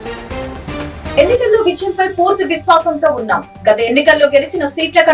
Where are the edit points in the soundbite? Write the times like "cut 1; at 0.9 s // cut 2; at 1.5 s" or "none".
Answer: cut 1; at 1.2 s

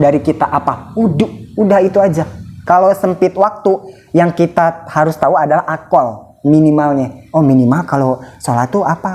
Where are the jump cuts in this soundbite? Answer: cut 1; at 2.5 s

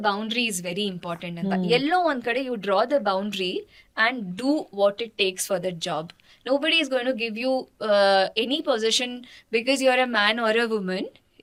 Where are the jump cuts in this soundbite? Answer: none

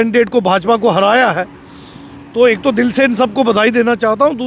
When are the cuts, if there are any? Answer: none

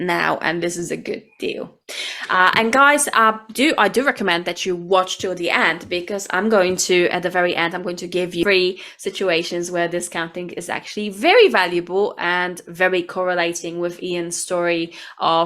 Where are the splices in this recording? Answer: cut 1; at 8.4 s

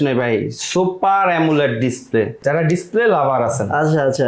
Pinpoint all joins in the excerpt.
cut 1; at 2.4 s

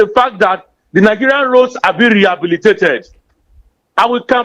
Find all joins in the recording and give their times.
none

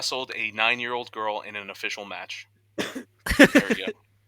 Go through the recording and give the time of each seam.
cut 1; at 2.9 s

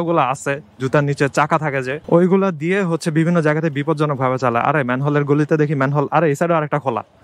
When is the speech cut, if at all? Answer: cut 1; at 2.0 s

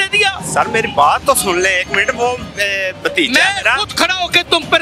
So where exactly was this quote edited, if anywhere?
none

